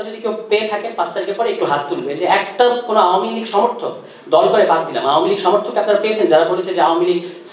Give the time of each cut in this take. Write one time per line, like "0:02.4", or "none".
none